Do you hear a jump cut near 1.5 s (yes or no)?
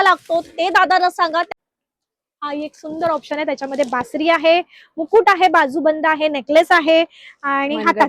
yes